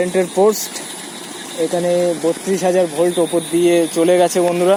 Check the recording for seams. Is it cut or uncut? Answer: uncut